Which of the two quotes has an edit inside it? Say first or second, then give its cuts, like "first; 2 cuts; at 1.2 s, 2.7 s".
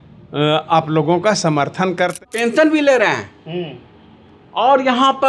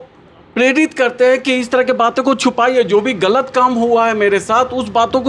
first; 1 cut; at 2.2 s